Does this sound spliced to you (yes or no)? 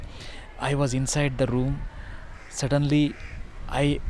no